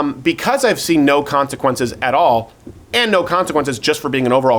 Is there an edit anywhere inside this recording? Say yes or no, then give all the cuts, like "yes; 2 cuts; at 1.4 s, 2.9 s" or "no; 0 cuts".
no; 0 cuts